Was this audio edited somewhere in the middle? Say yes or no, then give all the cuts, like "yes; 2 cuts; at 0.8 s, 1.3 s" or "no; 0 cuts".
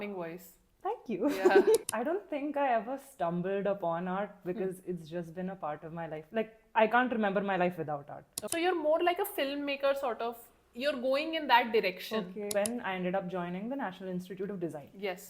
yes; 3 cuts; at 1.8 s, 8.4 s, 12.5 s